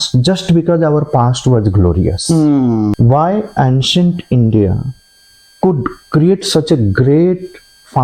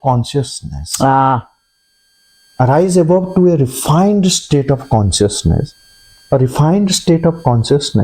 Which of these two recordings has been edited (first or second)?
first